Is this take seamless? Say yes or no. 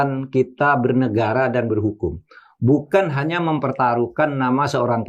yes